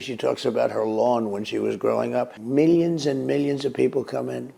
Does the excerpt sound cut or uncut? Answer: cut